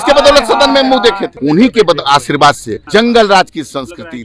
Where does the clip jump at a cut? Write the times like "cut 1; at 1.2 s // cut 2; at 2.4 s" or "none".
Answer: cut 1; at 1.3 s // cut 2; at 2.7 s